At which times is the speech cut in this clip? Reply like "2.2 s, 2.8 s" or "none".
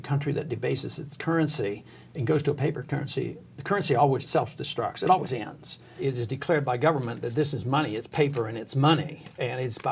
4.2 s, 6.0 s